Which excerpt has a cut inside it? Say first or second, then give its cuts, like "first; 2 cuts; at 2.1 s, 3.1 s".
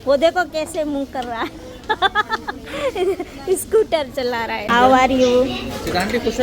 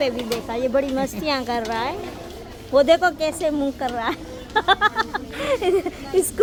first; 1 cut; at 4.7 s